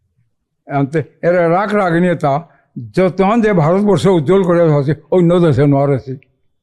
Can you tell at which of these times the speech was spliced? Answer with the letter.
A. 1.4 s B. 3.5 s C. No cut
C